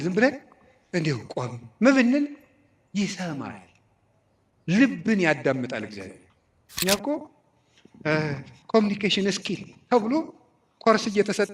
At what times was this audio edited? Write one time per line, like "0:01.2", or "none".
0:06.7